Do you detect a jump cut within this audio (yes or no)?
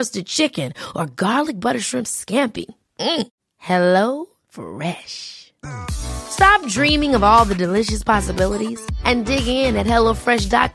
no